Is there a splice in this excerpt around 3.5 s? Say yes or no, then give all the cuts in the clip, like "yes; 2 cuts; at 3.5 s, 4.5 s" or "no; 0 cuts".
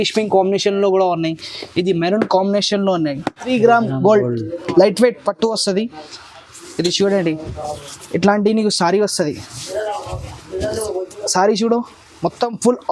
yes; 1 cut; at 3.5 s